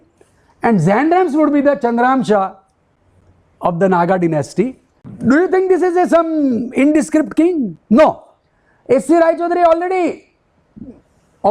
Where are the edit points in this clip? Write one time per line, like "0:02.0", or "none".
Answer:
0:05.1